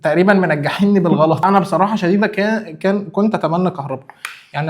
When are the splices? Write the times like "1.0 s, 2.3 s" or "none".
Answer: 1.4 s